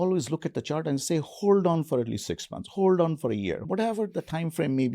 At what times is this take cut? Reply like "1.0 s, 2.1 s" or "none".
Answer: 3.6 s